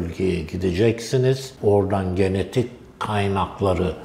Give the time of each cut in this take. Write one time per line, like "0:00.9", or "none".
0:01.5